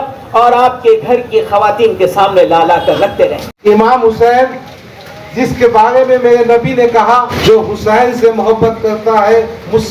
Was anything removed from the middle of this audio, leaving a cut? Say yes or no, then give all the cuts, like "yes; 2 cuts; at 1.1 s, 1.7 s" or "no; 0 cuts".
yes; 2 cuts; at 3.5 s, 7.3 s